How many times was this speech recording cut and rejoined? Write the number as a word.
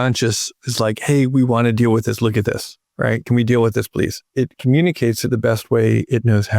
one